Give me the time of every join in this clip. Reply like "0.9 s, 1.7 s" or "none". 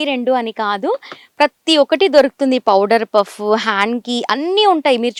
none